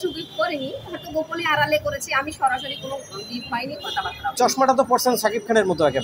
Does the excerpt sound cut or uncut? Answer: uncut